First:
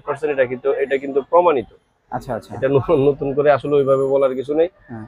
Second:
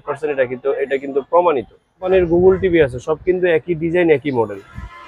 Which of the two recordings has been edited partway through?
second; 1 cut; at 2.1 s

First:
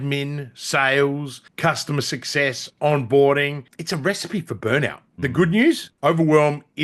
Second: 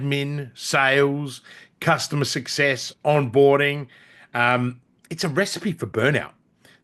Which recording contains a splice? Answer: first; 4 cuts; at 1.4 s, 3.7 s, 5.0 s, 5.9 s

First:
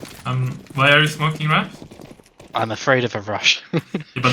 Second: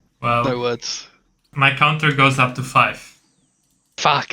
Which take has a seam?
second; 1 cut; at 1.5 s

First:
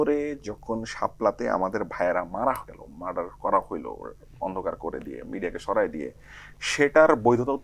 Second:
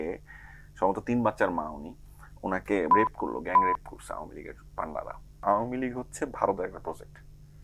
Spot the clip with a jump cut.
second; 1 cut; at 5.4 s

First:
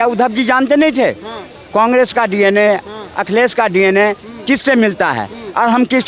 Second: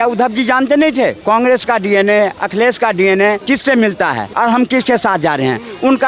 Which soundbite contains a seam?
second; 4 cuts; at 1.2 s, 2.4 s, 3.4 s, 4.3 s

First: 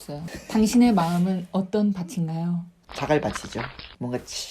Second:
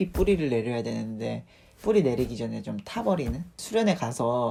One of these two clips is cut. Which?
first; 1 cut; at 2.8 s

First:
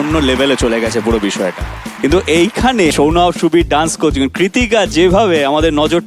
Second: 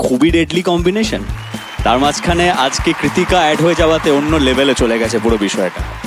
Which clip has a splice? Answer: first; 1 cut; at 2.9 s

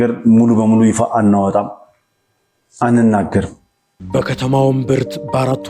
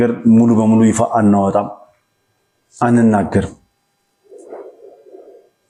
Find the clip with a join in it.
first; 1 cut; at 4.0 s

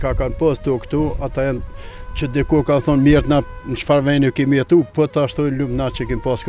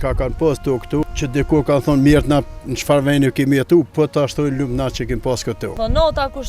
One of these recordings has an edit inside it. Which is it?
second; 2 cuts; at 1.0 s, 5.7 s

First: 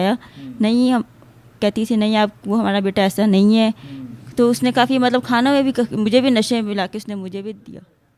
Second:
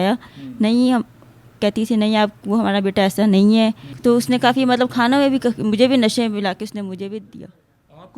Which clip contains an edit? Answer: second; 1 cut; at 3.9 s

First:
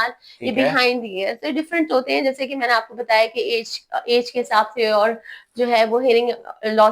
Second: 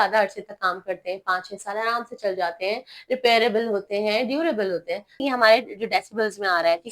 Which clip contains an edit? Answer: second; 1 cut; at 5.2 s

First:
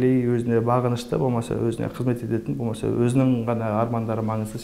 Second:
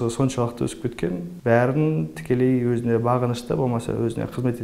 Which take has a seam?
second; 1 cut; at 1.3 s

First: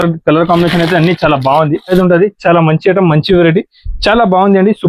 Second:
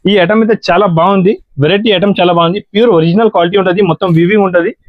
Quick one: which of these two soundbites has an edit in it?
first; 1 cut; at 1.9 s

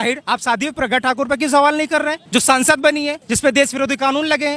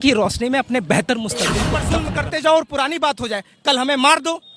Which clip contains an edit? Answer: second; 1 cut; at 1.9 s

